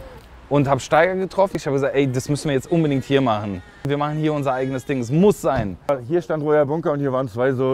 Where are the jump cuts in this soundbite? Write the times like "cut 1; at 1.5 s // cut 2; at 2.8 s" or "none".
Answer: cut 1; at 1.6 s // cut 2; at 3.8 s // cut 3; at 5.9 s